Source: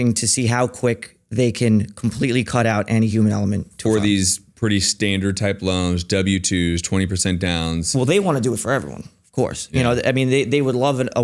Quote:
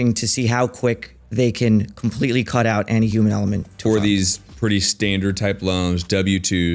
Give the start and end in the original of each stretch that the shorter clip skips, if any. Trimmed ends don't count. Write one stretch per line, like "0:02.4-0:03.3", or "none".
none